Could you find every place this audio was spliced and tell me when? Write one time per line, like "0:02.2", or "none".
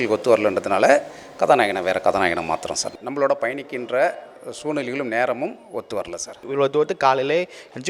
0:03.0
0:06.4